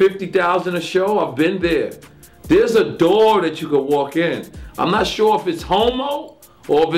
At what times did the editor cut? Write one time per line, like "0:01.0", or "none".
none